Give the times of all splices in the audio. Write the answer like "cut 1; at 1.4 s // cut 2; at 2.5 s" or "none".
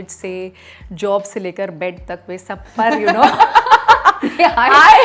none